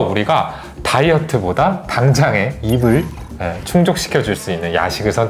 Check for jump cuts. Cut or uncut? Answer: uncut